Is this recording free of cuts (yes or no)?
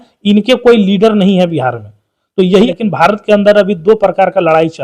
no